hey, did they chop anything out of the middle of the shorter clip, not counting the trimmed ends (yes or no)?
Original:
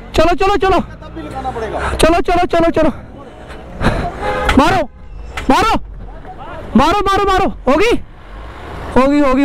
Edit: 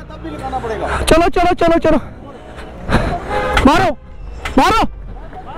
no